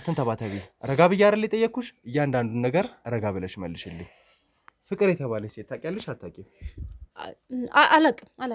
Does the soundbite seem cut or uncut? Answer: uncut